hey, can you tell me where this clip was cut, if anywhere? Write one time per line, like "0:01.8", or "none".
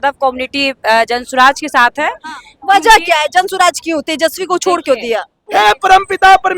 0:05.4